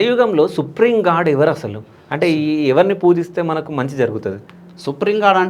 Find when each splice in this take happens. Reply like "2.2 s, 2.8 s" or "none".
none